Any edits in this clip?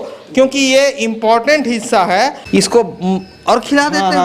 yes; 1 cut; at 2.4 s

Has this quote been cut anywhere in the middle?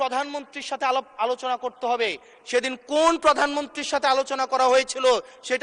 no; 0 cuts

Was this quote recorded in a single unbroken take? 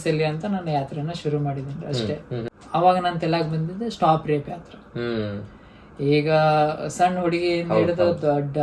no; 1 cut; at 2.5 s

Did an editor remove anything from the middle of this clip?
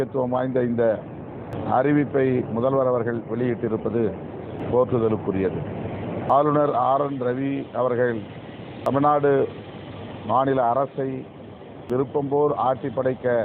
yes; 5 cuts; at 1.5 s, 4.6 s, 6.3 s, 8.9 s, 11.9 s

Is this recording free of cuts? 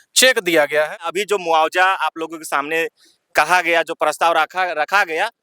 no; 1 cut; at 0.9 s

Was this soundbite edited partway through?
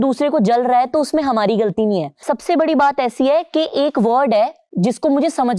yes; 1 cut; at 2.2 s

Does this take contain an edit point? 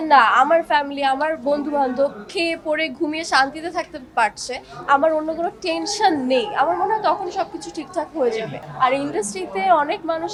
no; 0 cuts

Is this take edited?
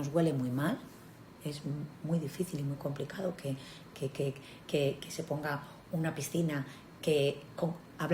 no; 0 cuts

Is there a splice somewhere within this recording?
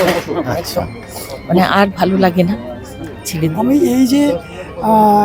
yes; 1 cut; at 3.5 s

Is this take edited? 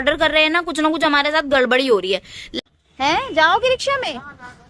yes; 1 cut; at 2.4 s

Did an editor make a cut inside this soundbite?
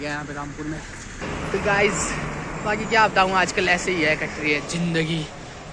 yes; 1 cut; at 1.2 s

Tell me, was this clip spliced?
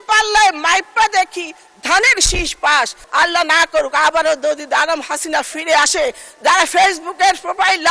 yes; 1 cut; at 3.0 s

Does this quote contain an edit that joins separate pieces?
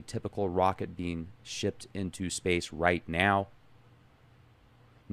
no; 0 cuts

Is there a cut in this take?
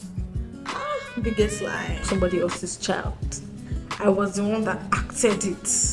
yes; 1 cut; at 2.0 s

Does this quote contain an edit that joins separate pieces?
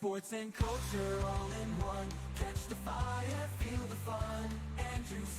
no; 0 cuts

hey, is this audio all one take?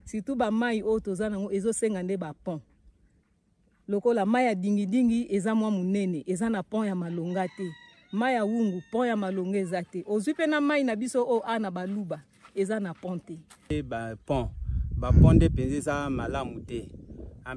no; 1 cut; at 13.7 s

